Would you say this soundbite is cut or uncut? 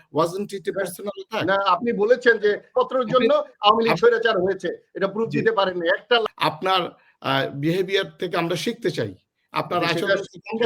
cut